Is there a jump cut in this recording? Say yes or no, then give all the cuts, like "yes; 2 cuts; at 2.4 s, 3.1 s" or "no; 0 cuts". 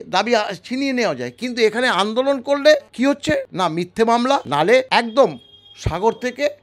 yes; 2 cuts; at 3.4 s, 4.7 s